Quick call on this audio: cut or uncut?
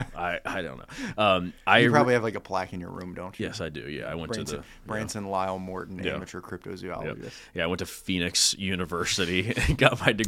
uncut